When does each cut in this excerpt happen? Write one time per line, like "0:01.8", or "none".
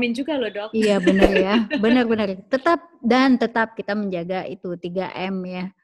none